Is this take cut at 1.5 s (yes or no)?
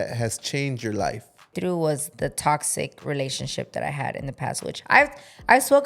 yes